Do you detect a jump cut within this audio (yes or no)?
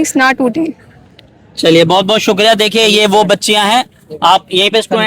no